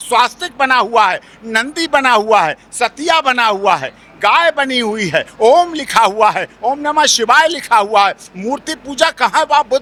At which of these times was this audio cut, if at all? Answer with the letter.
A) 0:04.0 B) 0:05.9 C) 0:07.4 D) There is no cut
D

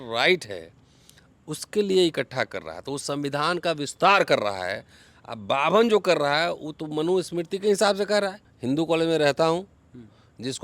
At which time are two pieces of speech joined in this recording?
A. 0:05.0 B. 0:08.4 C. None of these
B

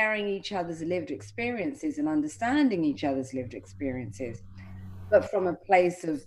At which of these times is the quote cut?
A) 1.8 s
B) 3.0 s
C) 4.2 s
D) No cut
D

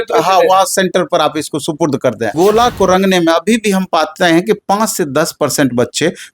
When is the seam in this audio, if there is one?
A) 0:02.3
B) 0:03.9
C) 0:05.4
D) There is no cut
A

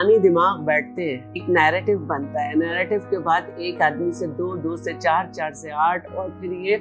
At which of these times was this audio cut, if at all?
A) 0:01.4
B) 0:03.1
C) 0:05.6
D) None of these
A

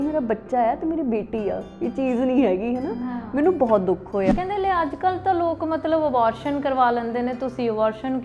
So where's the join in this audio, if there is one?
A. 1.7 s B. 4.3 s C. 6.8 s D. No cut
B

